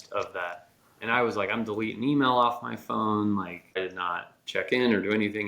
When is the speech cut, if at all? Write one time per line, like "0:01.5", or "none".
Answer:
0:03.7